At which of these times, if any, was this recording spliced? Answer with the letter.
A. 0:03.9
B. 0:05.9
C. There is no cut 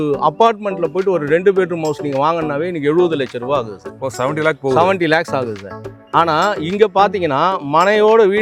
C